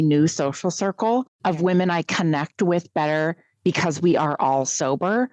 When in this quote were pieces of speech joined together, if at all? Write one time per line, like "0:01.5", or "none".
0:01.3